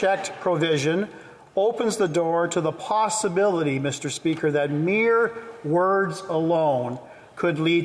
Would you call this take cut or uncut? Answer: uncut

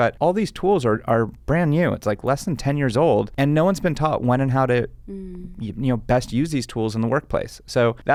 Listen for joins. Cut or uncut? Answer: uncut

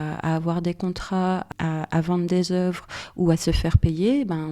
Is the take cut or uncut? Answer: cut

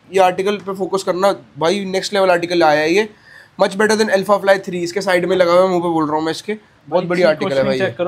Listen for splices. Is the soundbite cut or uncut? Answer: uncut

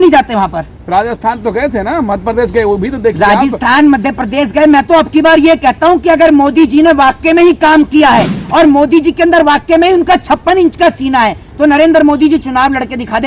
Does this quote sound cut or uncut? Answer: uncut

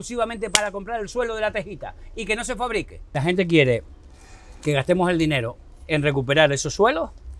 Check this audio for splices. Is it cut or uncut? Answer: cut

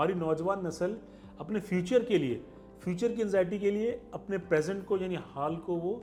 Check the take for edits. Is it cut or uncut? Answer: uncut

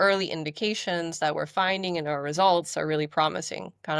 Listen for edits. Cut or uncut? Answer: uncut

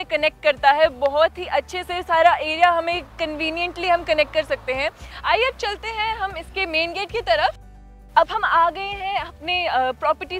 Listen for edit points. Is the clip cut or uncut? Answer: uncut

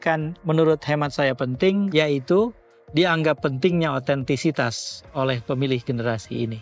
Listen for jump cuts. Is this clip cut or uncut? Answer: cut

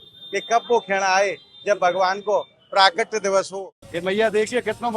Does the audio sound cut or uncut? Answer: cut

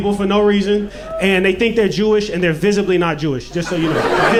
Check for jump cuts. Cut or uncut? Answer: uncut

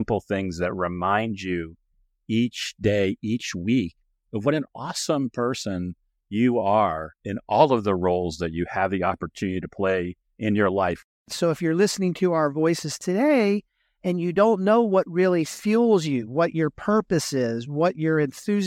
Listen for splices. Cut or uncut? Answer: cut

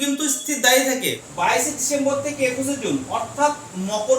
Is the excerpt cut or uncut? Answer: cut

